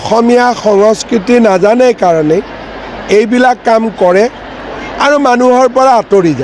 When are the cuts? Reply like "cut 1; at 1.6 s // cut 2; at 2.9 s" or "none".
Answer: none